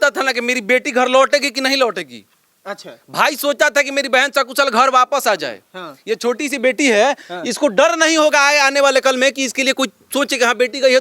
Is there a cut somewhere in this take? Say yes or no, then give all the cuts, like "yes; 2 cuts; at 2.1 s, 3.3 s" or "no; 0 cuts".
no; 0 cuts